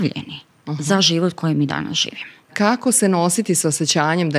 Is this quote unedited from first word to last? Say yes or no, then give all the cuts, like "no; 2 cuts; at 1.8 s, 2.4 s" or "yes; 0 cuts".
no; 1 cut; at 2.5 s